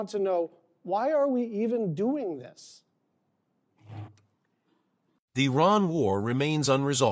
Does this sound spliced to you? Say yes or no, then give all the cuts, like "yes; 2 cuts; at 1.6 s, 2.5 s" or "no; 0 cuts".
no; 0 cuts